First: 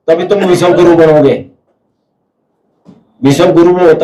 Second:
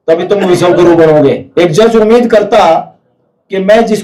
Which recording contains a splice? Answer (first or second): second